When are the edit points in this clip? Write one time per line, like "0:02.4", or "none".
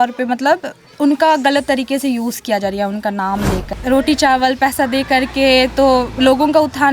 0:03.7